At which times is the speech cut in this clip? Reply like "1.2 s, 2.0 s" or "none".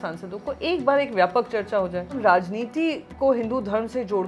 2.2 s

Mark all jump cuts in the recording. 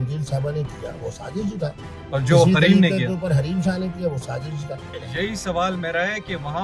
5.0 s

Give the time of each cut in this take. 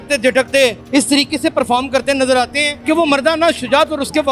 none

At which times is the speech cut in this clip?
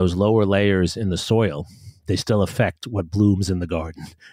none

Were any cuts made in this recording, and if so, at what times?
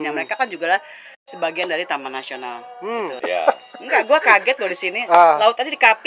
3.2 s

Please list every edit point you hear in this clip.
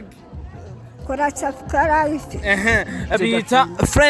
3.1 s

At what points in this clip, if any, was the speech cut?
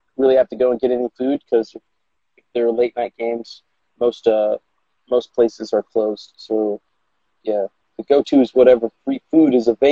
none

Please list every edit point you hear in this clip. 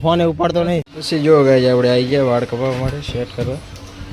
0.9 s

